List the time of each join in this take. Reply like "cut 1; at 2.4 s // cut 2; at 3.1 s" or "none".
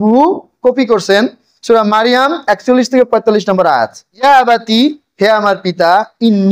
cut 1; at 4.2 s